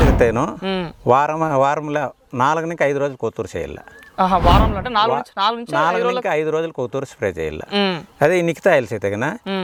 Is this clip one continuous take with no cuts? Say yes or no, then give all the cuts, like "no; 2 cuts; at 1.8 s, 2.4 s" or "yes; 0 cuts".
yes; 0 cuts